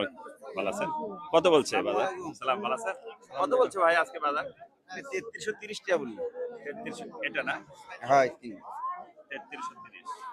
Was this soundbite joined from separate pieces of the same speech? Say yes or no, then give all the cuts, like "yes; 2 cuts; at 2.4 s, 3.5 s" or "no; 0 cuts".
no; 0 cuts